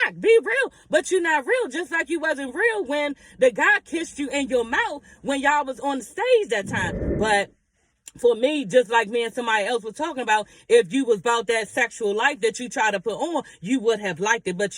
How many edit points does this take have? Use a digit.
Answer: 1